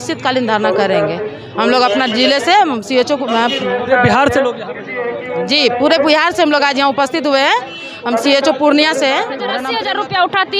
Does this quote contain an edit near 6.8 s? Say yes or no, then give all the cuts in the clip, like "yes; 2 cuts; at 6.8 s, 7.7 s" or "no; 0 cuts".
no; 1 cut; at 9.5 s